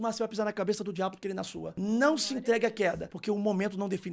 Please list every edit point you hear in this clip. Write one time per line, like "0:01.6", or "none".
0:01.6
0:03.1